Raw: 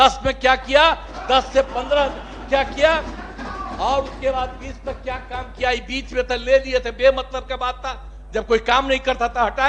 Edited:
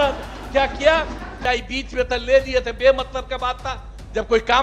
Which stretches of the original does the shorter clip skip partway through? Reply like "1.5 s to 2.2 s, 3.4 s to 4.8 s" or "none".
3.3 s to 5.5 s